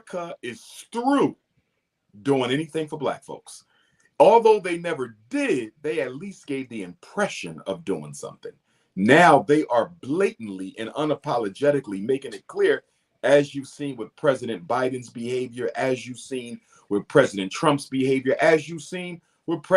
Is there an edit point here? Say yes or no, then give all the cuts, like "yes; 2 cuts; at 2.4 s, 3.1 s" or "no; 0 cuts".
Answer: no; 0 cuts